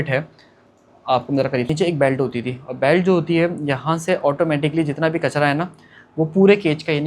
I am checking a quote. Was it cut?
yes; 1 cut; at 1.7 s

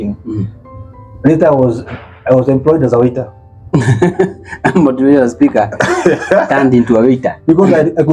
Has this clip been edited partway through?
no; 0 cuts

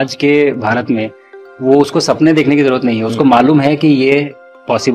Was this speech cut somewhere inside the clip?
no; 0 cuts

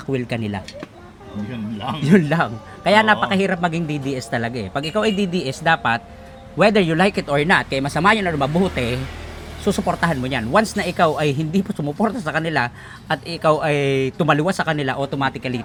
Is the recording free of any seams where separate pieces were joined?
yes; 0 cuts

